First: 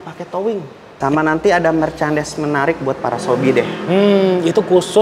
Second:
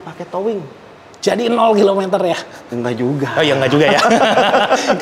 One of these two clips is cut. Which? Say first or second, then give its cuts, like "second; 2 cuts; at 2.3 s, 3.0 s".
first; 1 cut; at 1.0 s